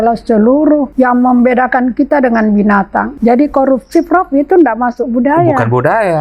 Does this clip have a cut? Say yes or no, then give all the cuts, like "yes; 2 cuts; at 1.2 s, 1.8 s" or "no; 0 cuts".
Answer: yes; 2 cuts; at 0.9 s, 3.1 s